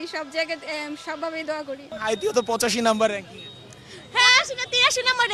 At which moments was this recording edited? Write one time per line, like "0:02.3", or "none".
none

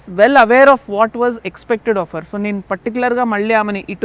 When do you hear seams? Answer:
none

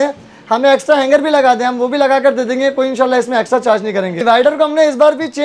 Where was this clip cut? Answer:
0:04.2

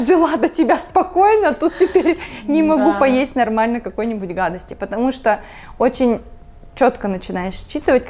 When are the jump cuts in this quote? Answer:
none

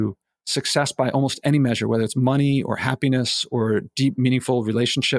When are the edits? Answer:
none

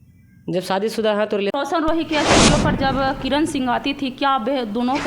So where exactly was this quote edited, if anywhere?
0:01.5

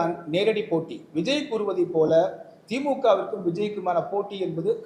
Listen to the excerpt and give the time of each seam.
none

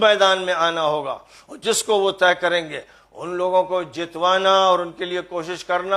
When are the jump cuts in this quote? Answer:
none

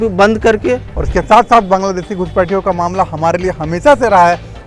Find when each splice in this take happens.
0:00.9

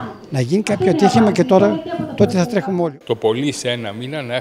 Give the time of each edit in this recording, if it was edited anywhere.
0:02.8

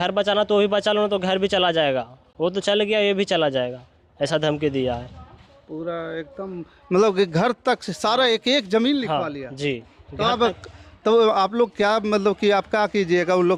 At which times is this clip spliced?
none

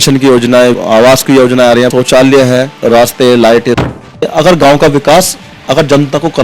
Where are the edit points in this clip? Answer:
0:01.9
0:02.8
0:03.9

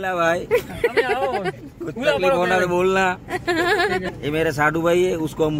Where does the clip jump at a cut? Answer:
0:04.1

